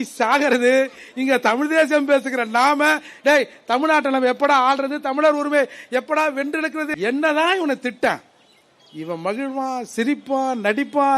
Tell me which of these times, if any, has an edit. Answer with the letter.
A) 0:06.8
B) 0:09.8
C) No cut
A